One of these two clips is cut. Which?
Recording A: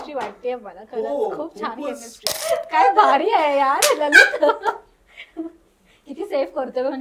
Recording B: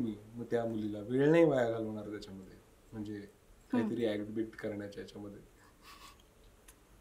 A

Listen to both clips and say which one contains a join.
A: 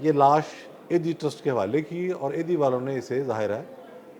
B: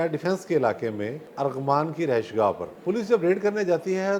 B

